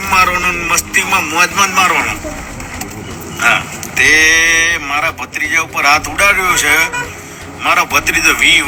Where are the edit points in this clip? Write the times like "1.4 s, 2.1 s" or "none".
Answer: none